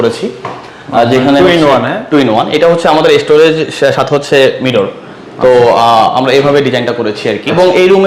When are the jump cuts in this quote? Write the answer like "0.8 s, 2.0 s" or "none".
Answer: none